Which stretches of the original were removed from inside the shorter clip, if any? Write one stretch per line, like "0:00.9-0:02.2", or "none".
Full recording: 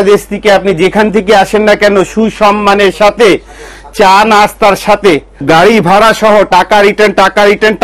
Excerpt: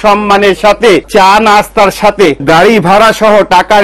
0:03.4-0:03.9
0:05.2-0:05.4